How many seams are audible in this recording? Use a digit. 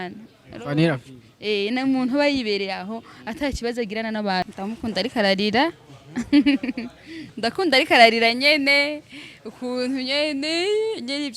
1